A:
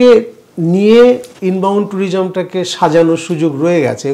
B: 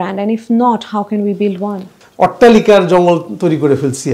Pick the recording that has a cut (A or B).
B